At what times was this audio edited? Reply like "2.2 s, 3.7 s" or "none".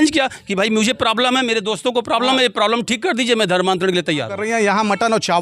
4.4 s